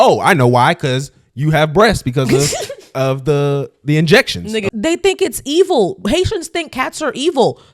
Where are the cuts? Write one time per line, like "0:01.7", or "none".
0:04.7

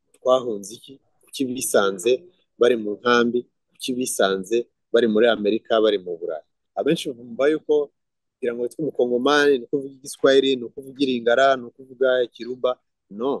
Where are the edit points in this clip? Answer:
0:06.6

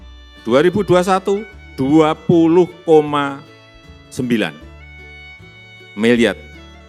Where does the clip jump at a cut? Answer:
none

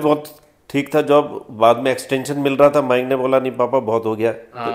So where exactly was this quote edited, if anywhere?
none

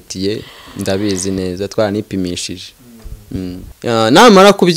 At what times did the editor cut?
0:03.7

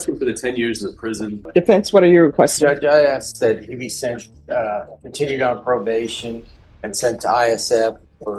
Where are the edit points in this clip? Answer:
0:01.4

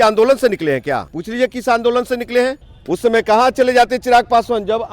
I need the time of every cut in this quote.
0:01.2
0:02.7

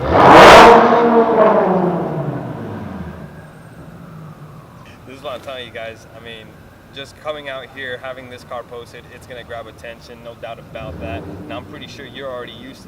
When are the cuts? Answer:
0:04.9

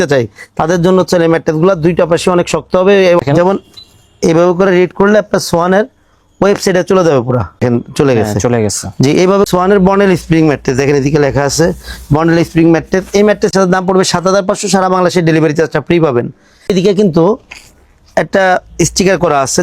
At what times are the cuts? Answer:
0:03.2
0:07.6
0:09.5
0:13.5
0:16.7

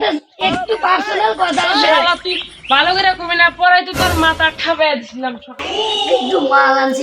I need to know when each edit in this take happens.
0:05.5

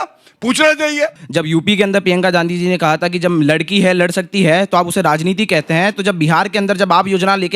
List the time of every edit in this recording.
0:01.2

